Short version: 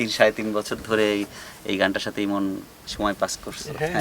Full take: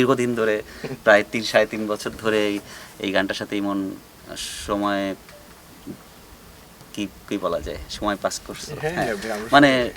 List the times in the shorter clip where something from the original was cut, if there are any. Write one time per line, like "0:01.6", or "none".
0:02.8